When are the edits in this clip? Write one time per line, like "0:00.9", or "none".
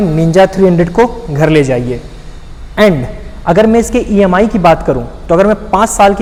none